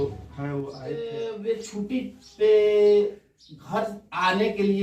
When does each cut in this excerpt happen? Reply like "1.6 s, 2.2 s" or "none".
1.1 s